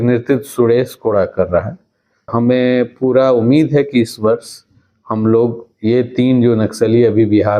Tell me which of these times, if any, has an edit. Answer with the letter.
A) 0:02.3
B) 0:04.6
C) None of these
A